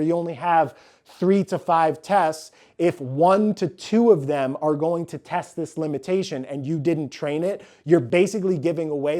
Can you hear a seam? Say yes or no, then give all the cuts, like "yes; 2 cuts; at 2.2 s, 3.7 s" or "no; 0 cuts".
yes; 1 cut; at 8.1 s